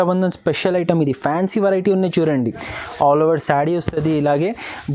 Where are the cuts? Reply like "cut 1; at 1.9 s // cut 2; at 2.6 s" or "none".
none

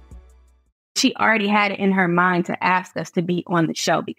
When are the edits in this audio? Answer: cut 1; at 1.0 s

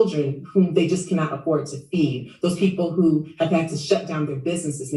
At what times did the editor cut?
none

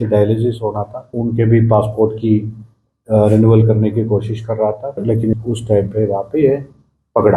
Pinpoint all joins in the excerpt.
cut 1; at 1.2 s // cut 2; at 5.3 s

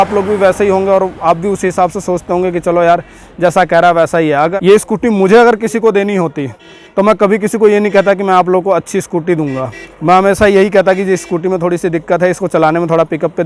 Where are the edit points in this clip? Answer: cut 1; at 4.6 s

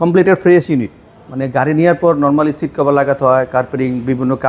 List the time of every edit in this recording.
none

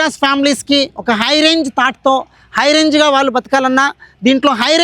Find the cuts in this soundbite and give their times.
none

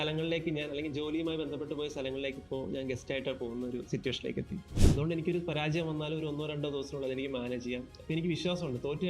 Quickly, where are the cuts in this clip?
cut 1; at 4.7 s

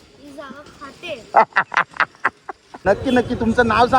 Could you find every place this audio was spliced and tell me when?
cut 1; at 2.7 s

